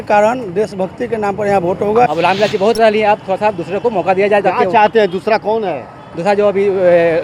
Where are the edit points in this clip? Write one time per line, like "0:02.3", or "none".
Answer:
0:02.1